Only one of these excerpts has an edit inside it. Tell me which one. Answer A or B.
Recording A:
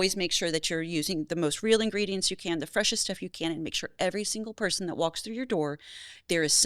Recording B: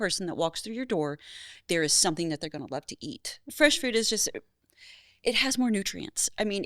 B